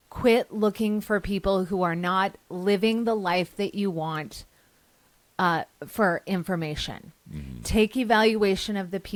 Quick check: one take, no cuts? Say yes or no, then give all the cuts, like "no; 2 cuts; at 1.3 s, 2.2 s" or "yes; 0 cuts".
yes; 0 cuts